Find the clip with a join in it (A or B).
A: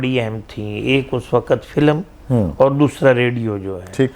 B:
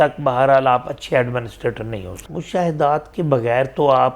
B